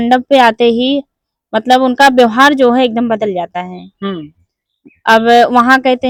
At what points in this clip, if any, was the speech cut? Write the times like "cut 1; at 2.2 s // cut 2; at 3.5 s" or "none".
none